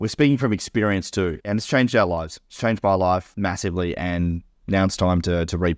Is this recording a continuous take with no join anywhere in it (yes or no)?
no